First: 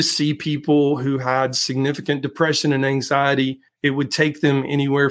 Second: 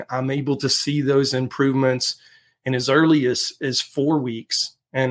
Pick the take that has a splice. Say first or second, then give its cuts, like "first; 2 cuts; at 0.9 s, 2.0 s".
first; 1 cut; at 3.7 s